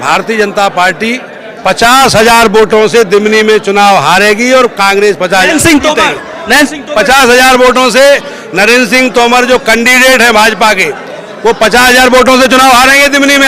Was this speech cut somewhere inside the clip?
no; 0 cuts

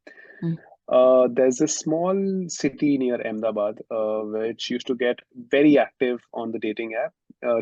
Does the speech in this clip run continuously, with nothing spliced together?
yes; 0 cuts

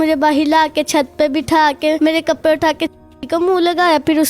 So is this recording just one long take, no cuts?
no; 1 cut; at 2.0 s

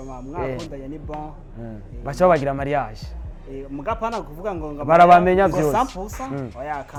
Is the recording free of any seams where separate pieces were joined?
yes; 0 cuts

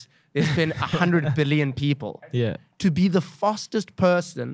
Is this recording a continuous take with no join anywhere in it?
no; 1 cut; at 2.3 s

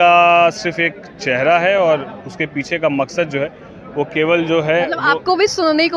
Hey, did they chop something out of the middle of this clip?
no; 0 cuts

